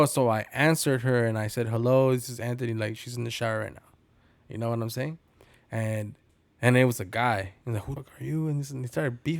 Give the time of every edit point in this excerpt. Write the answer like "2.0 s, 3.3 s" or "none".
8.0 s

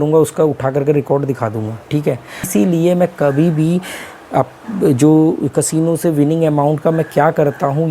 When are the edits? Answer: 2.5 s

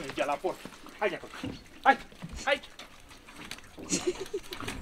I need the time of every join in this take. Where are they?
2.2 s

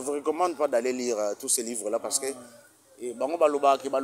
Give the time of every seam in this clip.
none

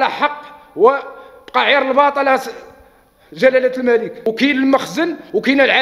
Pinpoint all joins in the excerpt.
4.2 s

